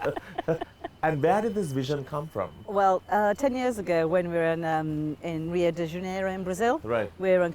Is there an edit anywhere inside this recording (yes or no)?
no